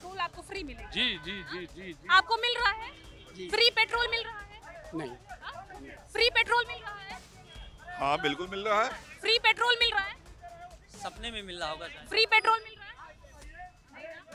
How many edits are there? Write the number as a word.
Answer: zero